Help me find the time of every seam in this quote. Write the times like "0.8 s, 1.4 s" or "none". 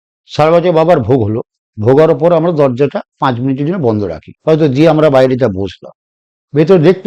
4.3 s